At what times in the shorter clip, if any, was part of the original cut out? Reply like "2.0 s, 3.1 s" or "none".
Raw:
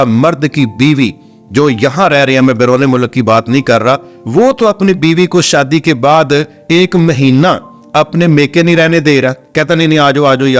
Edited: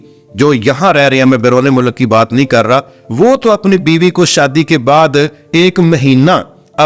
none